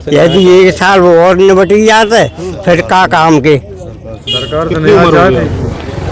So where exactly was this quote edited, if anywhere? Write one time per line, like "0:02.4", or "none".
none